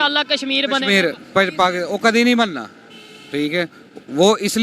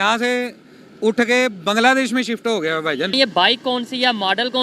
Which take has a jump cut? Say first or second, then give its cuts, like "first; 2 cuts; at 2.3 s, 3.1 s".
second; 1 cut; at 3.1 s